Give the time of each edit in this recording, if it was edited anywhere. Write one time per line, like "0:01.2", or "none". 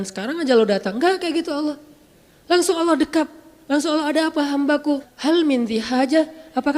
0:05.1